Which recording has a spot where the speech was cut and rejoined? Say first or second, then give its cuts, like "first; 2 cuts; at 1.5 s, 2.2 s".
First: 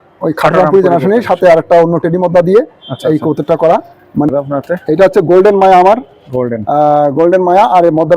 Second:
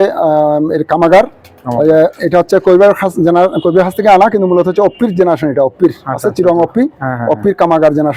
first; 1 cut; at 4.3 s